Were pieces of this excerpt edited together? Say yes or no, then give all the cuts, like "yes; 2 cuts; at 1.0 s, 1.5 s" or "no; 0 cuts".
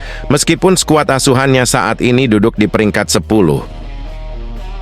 yes; 1 cut; at 3.9 s